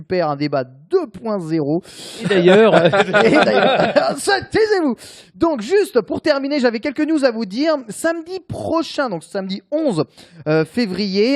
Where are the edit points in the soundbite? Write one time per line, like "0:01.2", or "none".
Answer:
0:06.6